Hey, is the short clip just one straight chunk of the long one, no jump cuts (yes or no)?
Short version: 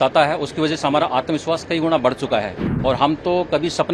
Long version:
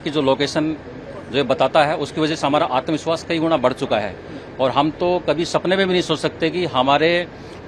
no